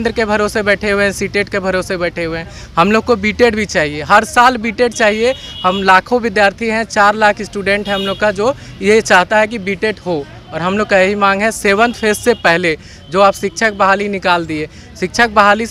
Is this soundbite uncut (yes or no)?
yes